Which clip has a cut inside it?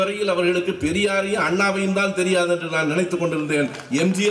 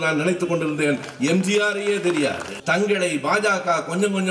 second; 1 cut; at 2.5 s

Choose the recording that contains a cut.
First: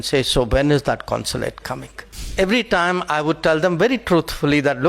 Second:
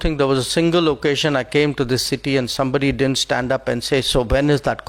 first; 1 cut; at 2.3 s

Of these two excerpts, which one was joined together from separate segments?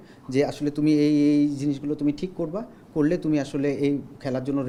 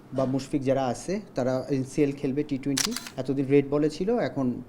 second; 1 cut; at 3.1 s

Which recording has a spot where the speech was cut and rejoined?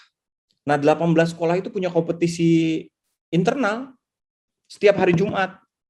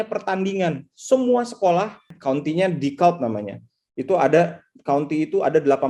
second; 1 cut; at 2.1 s

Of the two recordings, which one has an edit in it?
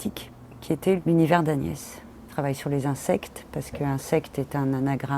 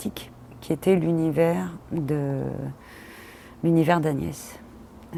first; 2 cuts; at 1.0 s, 2.2 s

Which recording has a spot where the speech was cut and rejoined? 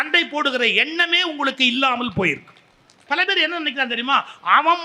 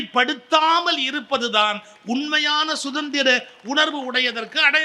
first; 1 cut; at 2.9 s

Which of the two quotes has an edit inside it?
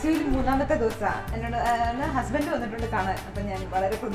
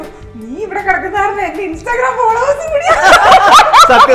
first; 1 cut; at 1.3 s

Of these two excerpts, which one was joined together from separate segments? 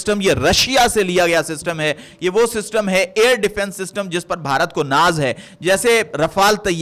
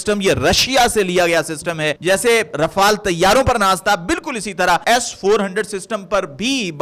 second; 2 cuts; at 1.9 s, 4.8 s

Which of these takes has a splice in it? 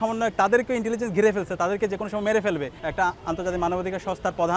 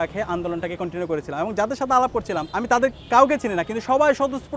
first; 1 cut; at 2.7 s

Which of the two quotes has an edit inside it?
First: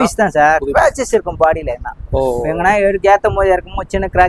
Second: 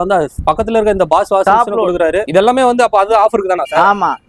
second; 1 cut; at 2.3 s

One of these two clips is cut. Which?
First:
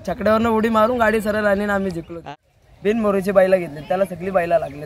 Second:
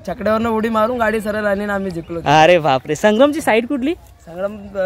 first; 1 cut; at 2.2 s

